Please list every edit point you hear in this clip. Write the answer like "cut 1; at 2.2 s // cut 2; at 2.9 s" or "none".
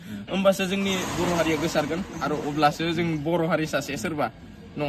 none